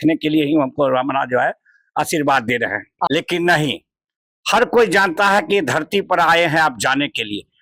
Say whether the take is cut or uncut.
cut